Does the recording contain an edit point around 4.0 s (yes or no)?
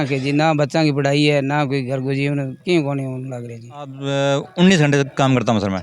yes